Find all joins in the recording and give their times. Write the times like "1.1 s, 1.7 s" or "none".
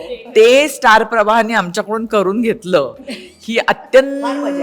none